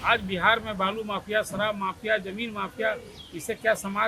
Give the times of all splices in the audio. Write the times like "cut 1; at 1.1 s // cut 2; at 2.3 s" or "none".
none

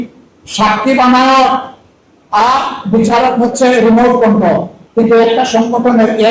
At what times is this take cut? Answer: cut 1; at 4.8 s

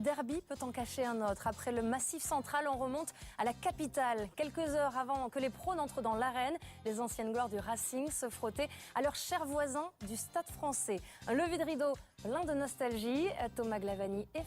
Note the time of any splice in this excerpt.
cut 1; at 3.0 s

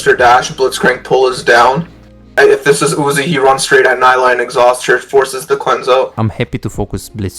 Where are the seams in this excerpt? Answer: cut 1; at 2.3 s // cut 2; at 6.1 s

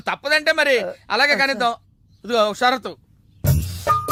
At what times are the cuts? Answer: none

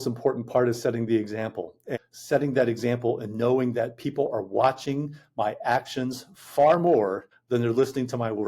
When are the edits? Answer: cut 1; at 1.9 s // cut 2; at 7.3 s

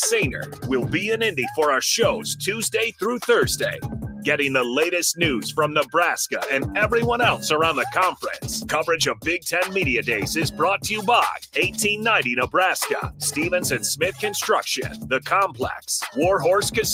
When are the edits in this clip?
none

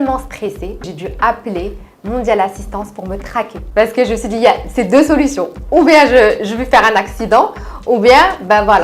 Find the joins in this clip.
cut 1; at 1.0 s // cut 2; at 3.6 s

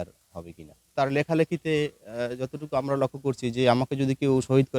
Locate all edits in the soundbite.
cut 1; at 0.9 s

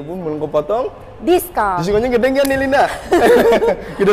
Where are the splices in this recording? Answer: none

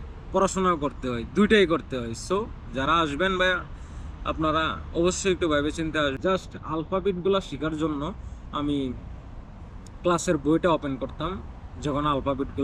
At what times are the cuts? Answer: cut 1; at 6.2 s

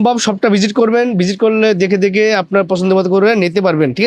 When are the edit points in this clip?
none

